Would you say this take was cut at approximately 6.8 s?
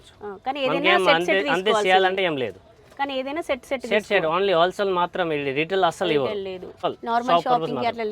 yes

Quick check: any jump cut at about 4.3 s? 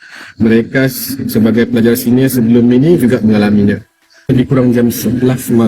yes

